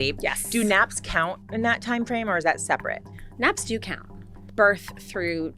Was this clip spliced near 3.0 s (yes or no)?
no